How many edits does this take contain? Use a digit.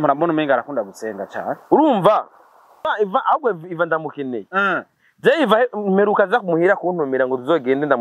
1